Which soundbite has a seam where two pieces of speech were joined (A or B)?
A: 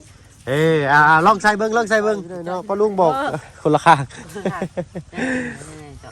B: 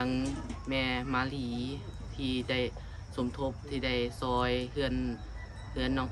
A